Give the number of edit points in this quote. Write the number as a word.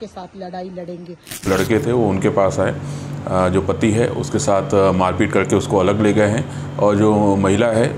one